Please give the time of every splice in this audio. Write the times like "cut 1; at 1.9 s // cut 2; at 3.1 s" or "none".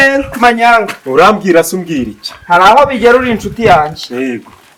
none